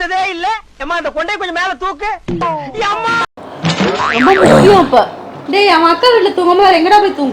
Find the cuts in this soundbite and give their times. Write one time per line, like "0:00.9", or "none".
0:05.4